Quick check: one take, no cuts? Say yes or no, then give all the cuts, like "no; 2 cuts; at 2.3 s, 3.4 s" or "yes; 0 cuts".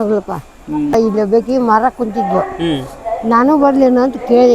no; 1 cut; at 0.9 s